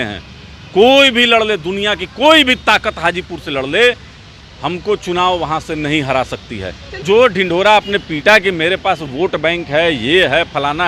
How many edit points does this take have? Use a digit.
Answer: 1